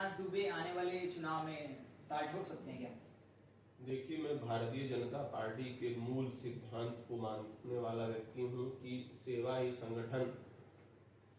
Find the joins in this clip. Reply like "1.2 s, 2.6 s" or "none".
none